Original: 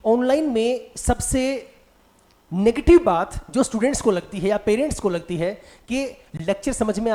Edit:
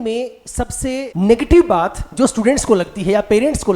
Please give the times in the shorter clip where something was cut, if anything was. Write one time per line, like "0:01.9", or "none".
0:01.1